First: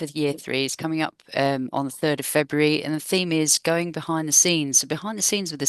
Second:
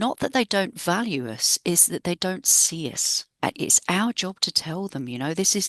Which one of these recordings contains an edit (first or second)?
second